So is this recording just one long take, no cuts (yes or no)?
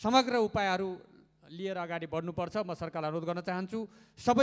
yes